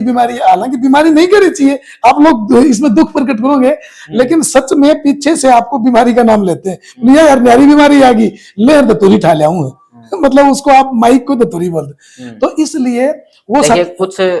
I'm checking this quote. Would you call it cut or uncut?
uncut